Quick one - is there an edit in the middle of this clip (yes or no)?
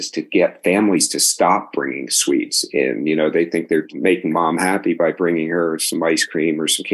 yes